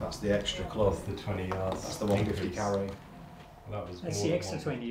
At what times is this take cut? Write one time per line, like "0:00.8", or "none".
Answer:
none